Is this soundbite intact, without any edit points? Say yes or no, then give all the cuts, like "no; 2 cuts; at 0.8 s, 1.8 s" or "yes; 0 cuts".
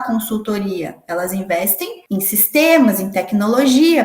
no; 1 cut; at 1.9 s